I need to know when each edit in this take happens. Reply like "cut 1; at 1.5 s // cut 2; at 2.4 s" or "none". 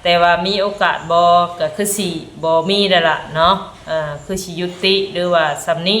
none